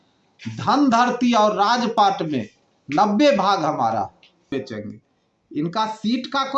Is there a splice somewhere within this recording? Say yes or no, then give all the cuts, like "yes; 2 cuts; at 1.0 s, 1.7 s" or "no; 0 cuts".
yes; 1 cut; at 4.5 s